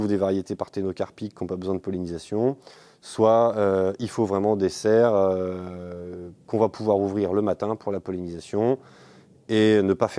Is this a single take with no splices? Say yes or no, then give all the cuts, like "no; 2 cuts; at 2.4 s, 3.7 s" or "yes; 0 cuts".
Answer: yes; 0 cuts